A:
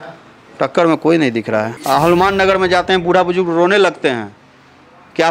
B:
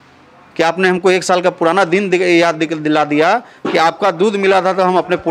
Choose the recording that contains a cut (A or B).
A